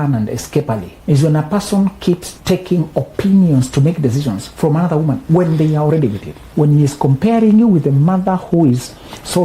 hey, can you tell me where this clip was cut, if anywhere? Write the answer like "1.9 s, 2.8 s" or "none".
0.9 s, 2.3 s, 6.5 s